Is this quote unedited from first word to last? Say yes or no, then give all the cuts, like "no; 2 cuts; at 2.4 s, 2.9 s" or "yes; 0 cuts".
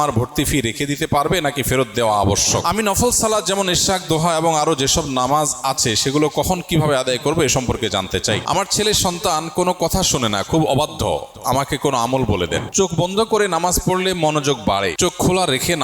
no; 4 cuts; at 2.6 s, 8.4 s, 12.7 s, 14.9 s